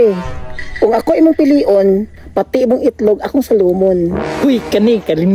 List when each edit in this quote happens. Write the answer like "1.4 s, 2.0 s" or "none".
none